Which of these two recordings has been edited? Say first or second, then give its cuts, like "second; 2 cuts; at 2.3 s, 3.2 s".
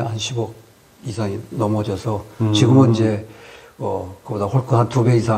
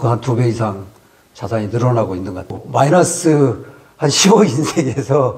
second; 1 cut; at 2.6 s